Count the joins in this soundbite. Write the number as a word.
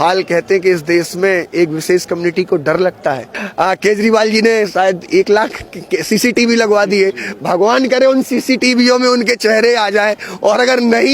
one